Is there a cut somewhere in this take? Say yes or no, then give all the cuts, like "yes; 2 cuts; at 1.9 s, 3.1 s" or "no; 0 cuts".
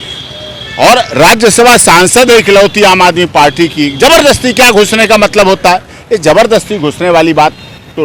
no; 0 cuts